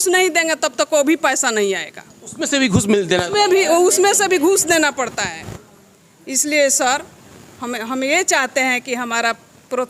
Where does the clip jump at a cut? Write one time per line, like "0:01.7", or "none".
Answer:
none